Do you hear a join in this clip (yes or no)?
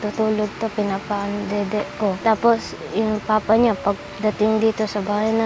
yes